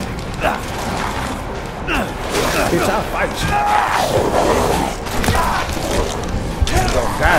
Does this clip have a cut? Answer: no; 0 cuts

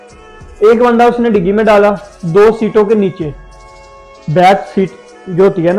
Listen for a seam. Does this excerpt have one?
no; 0 cuts

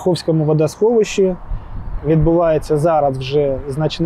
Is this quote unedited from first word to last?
yes; 0 cuts

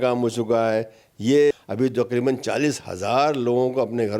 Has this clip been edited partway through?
yes; 1 cut; at 1.5 s

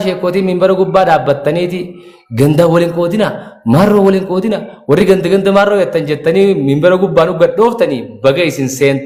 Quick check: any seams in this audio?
no; 0 cuts

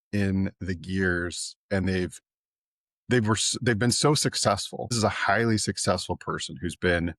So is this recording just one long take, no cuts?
no; 1 cut; at 5.0 s

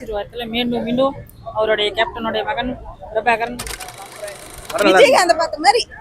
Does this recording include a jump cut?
yes; 1 cut; at 3.9 s

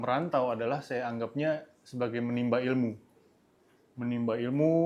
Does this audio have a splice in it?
no; 0 cuts

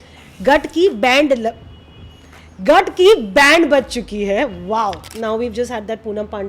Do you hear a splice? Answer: yes; 1 cut; at 5.0 s

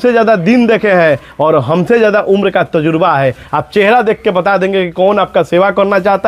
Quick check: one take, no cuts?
yes; 0 cuts

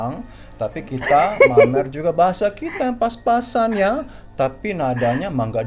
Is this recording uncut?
yes; 0 cuts

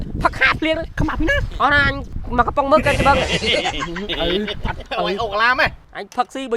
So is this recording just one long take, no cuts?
no; 2 cuts; at 0.9 s, 4.8 s

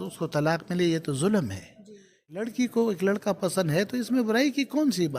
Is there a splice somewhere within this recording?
yes; 1 cut; at 2.4 s

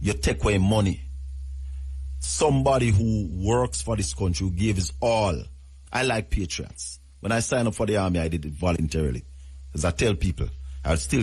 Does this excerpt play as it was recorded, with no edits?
yes; 0 cuts

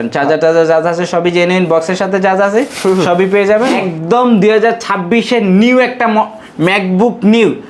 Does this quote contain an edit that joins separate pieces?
yes; 1 cut; at 3.7 s

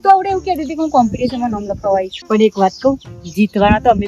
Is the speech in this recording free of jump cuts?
no; 1 cut; at 2.2 s

